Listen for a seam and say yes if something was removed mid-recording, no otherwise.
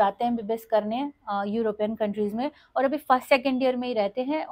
no